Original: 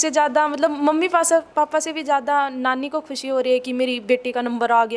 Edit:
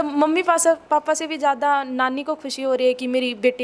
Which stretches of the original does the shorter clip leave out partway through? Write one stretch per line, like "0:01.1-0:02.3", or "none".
none